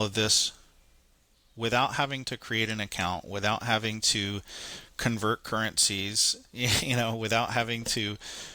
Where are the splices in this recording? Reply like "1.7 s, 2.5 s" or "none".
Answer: none